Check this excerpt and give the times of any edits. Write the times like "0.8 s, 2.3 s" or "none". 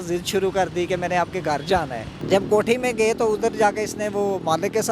2.1 s